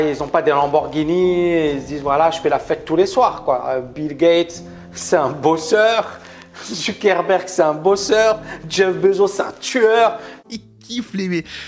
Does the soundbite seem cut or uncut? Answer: cut